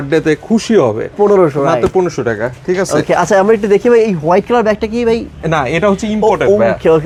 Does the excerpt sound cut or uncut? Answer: uncut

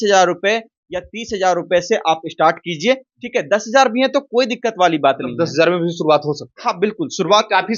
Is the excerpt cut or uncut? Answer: uncut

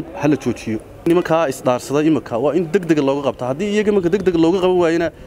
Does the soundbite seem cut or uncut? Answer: cut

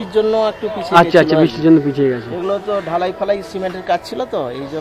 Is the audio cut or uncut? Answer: uncut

